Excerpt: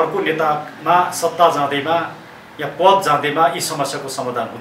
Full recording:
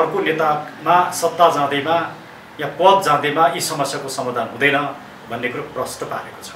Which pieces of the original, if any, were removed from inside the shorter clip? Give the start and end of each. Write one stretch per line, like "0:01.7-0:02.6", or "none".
none